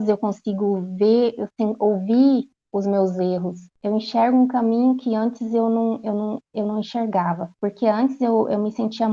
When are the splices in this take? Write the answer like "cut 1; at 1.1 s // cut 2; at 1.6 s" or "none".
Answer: cut 1; at 3.7 s

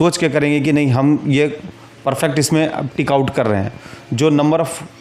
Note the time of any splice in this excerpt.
none

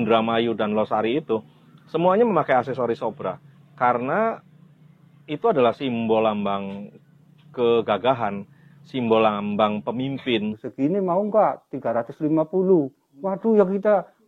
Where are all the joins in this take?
cut 1; at 10.6 s

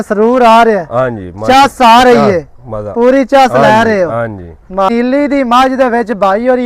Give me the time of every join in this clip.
cut 1; at 4.9 s

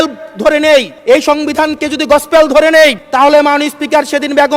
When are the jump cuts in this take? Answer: cut 1; at 0.9 s // cut 2; at 3.0 s

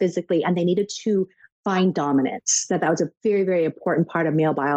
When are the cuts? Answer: none

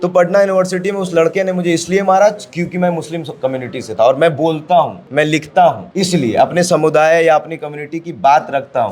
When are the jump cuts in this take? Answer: cut 1; at 5.0 s // cut 2; at 5.8 s

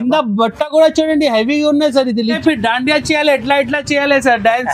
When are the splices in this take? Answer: cut 1; at 2.4 s

